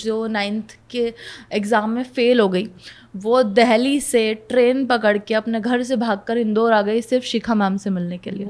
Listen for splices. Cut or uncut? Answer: uncut